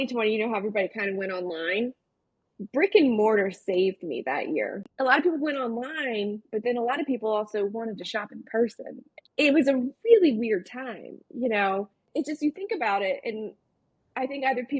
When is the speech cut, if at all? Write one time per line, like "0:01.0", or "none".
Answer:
0:04.8